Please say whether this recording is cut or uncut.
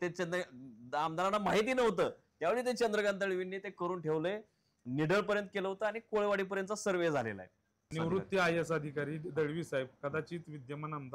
cut